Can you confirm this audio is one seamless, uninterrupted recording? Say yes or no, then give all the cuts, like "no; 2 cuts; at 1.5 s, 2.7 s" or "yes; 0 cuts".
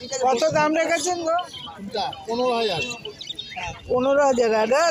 yes; 0 cuts